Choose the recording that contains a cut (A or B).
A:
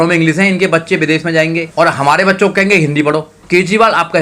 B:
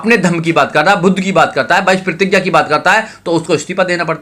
A